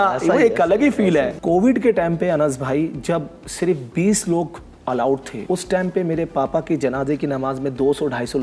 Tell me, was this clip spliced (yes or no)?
yes